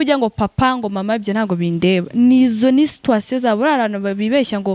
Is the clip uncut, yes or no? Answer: yes